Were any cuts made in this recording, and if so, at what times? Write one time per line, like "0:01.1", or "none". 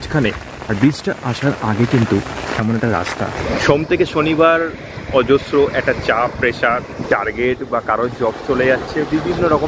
0:03.4
0:07.0

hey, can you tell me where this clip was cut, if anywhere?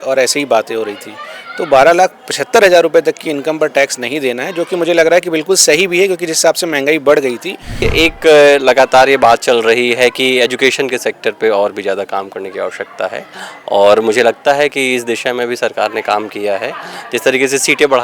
0:07.9

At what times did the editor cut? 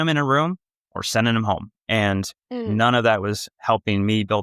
none

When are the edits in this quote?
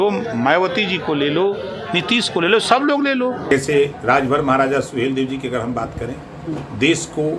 0:03.5

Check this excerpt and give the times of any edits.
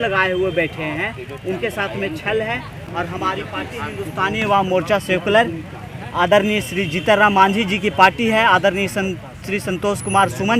none

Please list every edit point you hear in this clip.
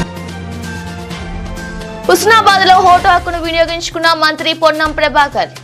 0:01.2

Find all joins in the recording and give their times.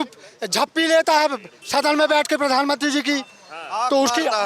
none

